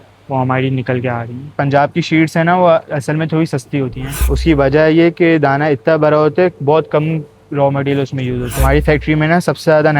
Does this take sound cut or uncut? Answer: cut